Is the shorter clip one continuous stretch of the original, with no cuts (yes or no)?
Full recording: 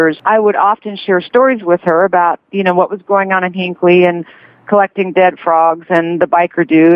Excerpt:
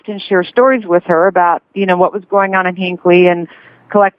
yes